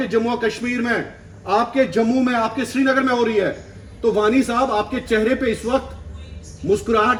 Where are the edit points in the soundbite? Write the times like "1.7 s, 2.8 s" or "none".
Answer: none